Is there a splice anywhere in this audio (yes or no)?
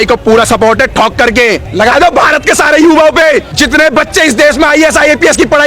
yes